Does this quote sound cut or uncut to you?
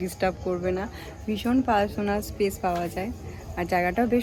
uncut